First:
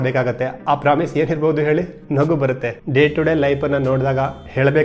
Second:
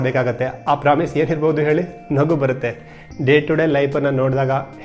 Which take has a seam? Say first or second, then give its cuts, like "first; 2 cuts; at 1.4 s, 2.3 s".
first; 1 cut; at 2.7 s